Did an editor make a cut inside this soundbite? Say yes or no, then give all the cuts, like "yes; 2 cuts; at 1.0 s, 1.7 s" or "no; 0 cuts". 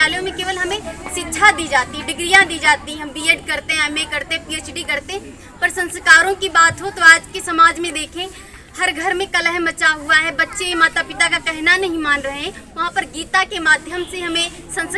no; 0 cuts